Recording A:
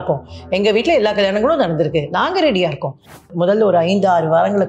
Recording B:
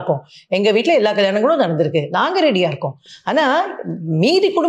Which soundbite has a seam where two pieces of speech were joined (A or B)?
A